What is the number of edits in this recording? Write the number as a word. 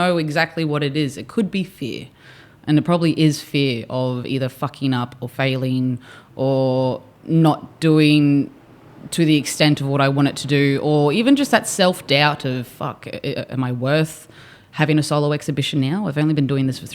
zero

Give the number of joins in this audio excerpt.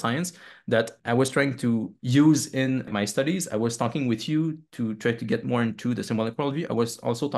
three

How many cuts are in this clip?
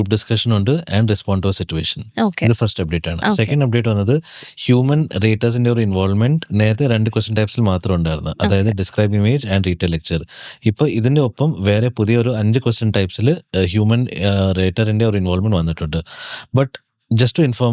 zero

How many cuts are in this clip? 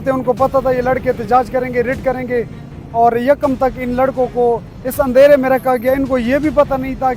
zero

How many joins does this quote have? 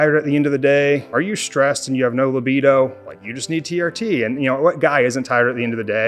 one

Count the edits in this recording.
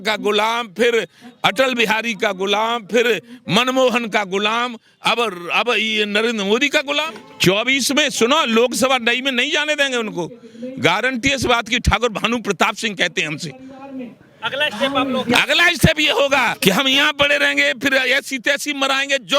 two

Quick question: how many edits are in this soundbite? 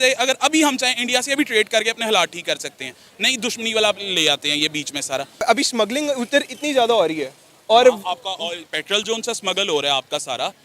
one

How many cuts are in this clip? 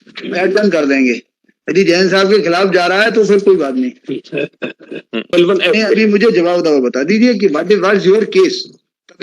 one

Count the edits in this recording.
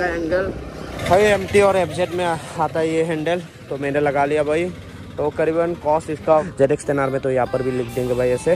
two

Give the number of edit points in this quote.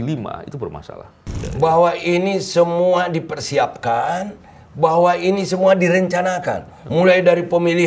one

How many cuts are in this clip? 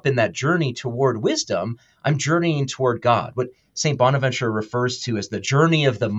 zero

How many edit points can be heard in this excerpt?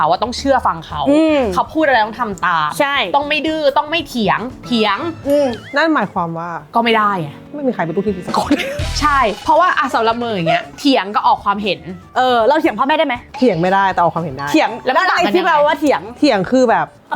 zero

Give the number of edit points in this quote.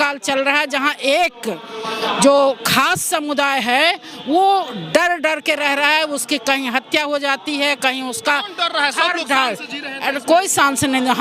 zero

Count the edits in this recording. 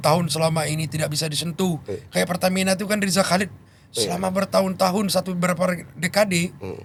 zero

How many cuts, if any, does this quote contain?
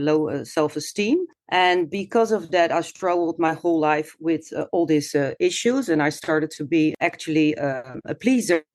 two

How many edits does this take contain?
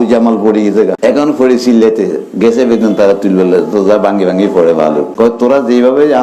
two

